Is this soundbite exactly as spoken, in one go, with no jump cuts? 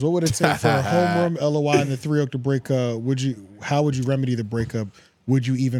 yes; 0 cuts

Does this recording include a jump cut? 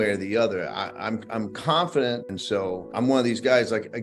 yes; 1 cut; at 2.2 s

